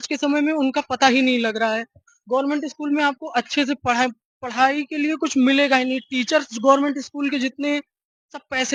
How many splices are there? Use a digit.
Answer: 0